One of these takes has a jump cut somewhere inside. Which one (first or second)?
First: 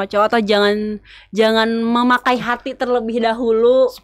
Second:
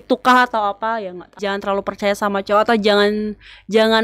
second